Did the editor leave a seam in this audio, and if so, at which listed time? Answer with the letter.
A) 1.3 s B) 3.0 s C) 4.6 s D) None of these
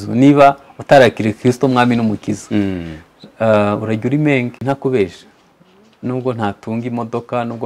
C